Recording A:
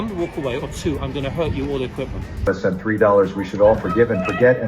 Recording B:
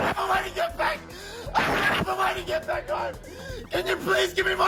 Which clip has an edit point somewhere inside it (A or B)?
A